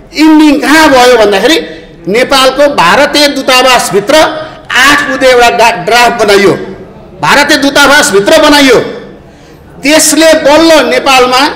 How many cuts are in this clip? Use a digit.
0